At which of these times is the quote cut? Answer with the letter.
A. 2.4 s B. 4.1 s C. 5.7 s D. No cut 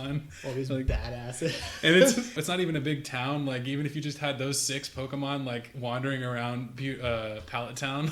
A